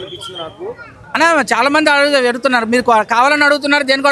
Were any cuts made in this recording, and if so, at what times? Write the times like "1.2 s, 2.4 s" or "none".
0.9 s